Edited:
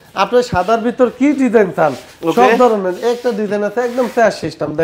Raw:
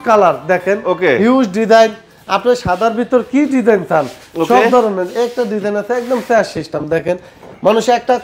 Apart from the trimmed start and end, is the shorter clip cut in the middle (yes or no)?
no